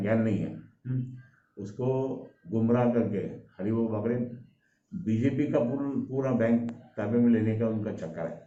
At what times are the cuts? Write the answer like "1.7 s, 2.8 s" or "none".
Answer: none